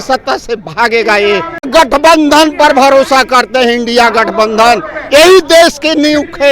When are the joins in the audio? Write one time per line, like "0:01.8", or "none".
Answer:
0:01.7